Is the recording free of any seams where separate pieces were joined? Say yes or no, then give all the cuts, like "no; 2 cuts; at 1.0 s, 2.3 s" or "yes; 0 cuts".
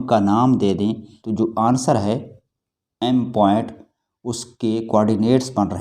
no; 1 cut; at 1.1 s